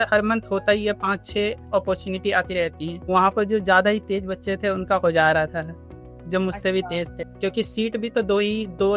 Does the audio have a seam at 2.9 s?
yes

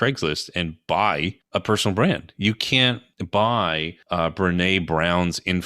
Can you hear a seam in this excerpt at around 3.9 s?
yes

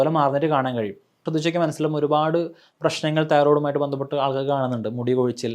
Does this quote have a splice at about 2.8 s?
no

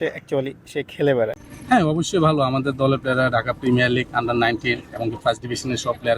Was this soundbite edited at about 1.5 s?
yes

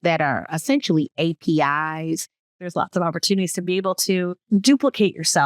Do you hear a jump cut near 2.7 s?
yes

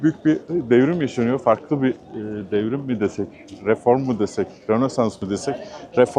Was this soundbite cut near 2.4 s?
no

